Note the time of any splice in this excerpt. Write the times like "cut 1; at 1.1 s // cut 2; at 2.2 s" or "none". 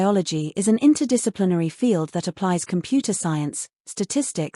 cut 1; at 2.2 s